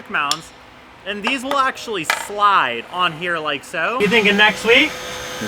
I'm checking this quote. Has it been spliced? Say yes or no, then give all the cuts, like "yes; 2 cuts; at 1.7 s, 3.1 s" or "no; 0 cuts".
yes; 1 cut; at 4.0 s